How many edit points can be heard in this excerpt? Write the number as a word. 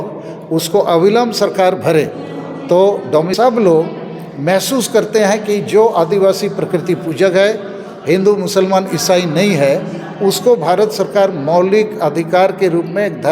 one